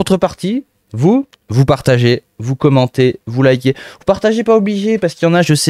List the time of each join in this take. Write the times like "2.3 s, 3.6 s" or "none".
1.4 s